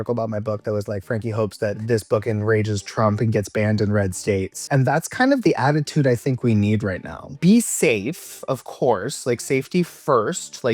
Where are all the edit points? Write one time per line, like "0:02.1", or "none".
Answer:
0:01.8
0:04.6
0:07.3